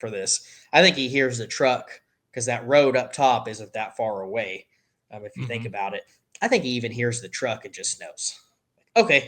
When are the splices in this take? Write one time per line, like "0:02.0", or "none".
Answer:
none